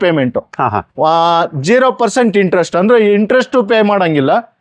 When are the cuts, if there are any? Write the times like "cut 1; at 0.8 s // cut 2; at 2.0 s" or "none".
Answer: none